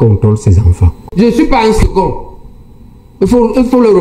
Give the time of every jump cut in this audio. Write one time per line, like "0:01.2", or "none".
0:00.9